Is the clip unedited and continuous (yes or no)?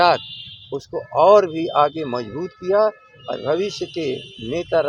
yes